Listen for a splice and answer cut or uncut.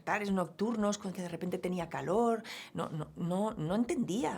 uncut